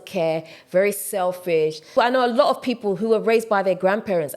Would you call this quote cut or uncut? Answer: cut